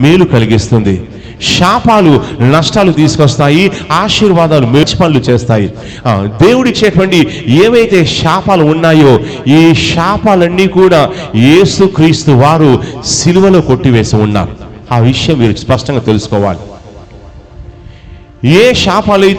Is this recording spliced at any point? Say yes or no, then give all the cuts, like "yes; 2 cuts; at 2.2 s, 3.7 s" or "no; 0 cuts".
yes; 1 cut; at 4.8 s